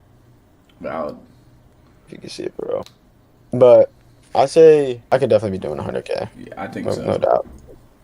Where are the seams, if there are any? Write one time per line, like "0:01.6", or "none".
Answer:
0:05.1